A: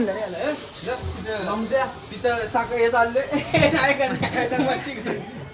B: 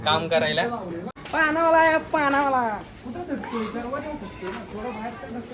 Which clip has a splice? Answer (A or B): B